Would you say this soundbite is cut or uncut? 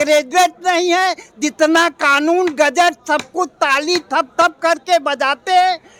uncut